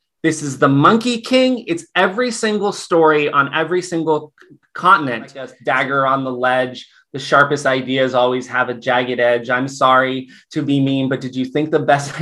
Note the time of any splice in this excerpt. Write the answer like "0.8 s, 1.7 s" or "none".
5.5 s